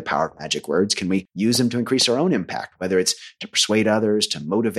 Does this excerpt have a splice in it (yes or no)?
yes